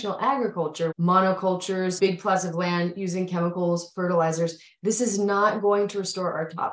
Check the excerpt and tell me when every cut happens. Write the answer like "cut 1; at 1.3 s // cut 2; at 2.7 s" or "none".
cut 1; at 0.9 s // cut 2; at 2.0 s